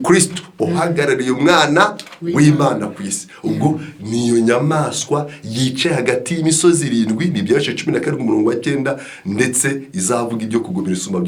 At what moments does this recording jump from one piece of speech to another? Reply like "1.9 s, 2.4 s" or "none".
none